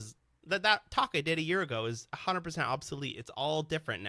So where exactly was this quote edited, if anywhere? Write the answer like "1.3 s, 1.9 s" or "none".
none

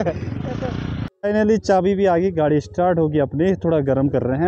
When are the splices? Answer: 1.0 s

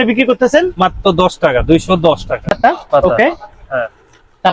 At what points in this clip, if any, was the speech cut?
2.5 s

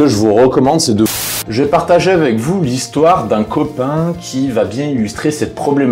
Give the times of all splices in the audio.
1.1 s

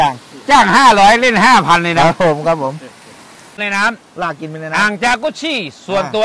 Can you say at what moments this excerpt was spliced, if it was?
3.6 s

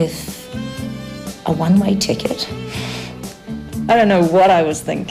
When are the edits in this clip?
none

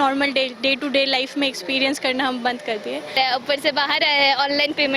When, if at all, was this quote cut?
3.1 s

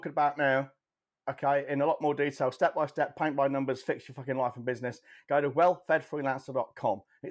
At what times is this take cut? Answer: none

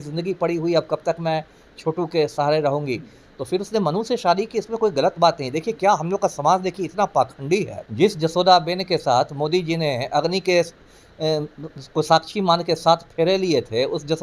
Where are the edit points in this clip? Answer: 7.8 s

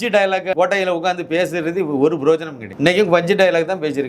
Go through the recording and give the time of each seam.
none

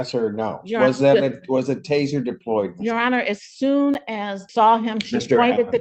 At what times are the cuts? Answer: 4.4 s

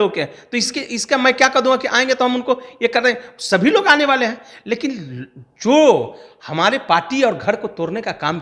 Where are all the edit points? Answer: none

